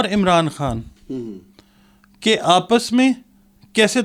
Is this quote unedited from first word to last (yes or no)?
yes